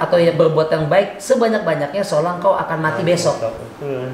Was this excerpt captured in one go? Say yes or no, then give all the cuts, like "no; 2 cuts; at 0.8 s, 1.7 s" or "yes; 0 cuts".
yes; 0 cuts